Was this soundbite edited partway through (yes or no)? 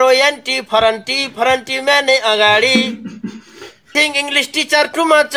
yes